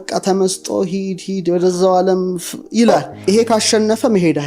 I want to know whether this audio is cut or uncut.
cut